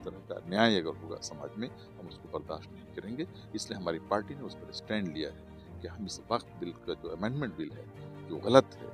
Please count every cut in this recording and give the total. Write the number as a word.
zero